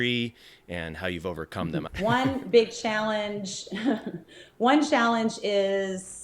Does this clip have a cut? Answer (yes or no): yes